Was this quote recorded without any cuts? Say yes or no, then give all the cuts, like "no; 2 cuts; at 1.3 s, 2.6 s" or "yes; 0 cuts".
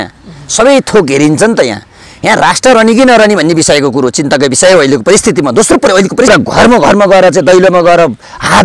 no; 1 cut; at 6.3 s